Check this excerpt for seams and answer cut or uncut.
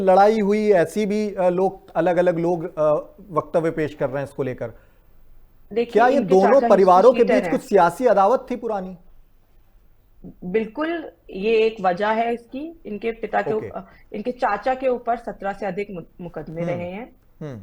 uncut